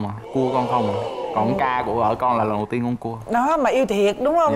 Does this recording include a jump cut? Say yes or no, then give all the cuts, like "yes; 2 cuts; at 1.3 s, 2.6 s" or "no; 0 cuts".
no; 0 cuts